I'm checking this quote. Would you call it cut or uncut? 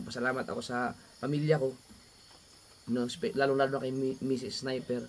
uncut